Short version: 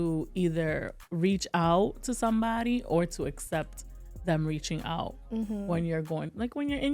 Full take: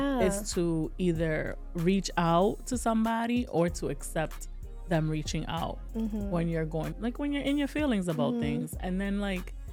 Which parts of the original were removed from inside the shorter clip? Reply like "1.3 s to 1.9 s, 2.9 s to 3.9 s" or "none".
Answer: none